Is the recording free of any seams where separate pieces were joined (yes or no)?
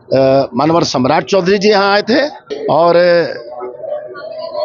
no